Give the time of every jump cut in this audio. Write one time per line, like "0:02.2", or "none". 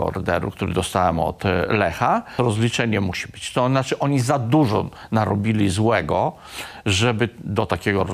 0:02.3